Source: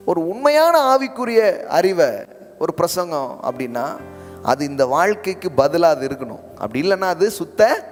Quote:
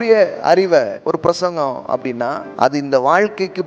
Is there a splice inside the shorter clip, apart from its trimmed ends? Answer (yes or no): yes